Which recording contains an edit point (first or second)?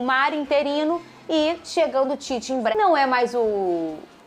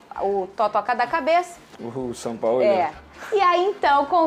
first